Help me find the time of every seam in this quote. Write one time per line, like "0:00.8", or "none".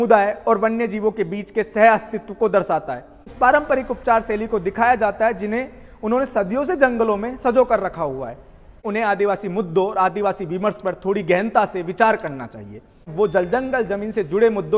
0:03.2
0:08.8
0:13.1